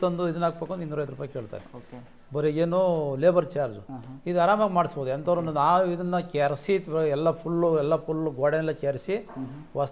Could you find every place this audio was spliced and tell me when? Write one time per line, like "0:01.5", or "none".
none